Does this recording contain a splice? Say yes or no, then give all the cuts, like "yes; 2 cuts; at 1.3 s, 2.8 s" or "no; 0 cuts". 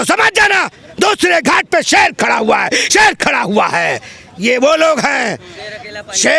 no; 0 cuts